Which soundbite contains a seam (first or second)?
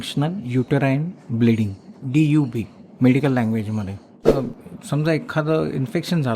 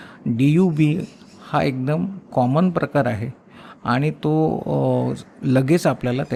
first